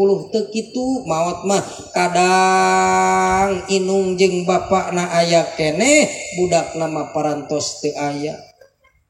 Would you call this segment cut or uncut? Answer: uncut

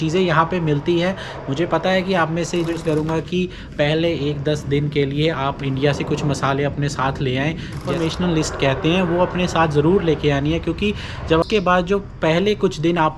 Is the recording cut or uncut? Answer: cut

